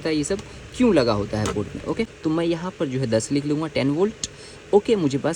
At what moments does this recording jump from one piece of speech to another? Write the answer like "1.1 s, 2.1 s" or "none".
2.1 s

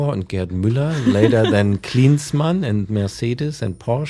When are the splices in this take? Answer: none

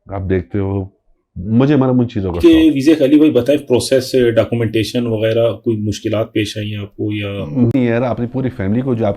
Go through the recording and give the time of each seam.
2.4 s, 7.7 s

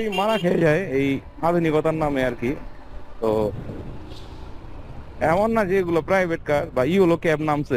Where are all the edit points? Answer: none

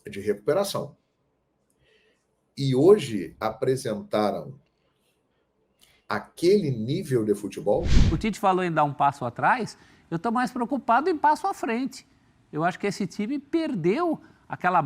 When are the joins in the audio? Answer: 8.0 s

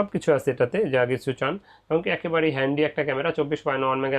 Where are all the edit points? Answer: none

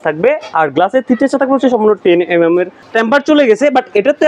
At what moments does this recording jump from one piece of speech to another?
2.8 s

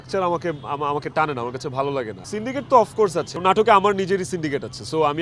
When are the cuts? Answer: 2.2 s, 3.3 s

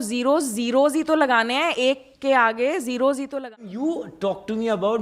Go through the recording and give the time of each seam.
3.4 s

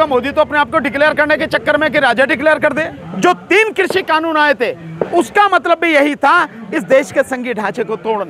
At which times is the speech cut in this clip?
3.0 s

